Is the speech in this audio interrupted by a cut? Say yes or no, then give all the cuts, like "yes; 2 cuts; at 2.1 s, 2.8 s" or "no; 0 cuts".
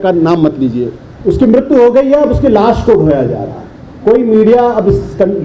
yes; 1 cut; at 1.0 s